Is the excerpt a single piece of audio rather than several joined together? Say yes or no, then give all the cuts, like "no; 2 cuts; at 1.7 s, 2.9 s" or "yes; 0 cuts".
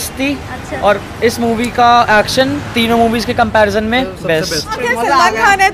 no; 1 cut; at 4.8 s